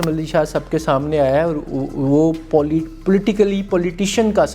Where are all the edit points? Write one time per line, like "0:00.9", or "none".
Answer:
none